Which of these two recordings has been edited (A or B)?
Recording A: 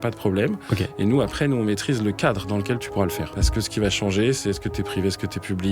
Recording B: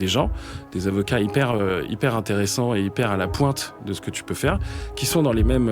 A